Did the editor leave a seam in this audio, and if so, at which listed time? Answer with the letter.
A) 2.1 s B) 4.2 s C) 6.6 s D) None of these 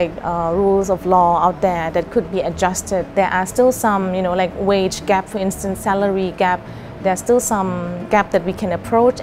D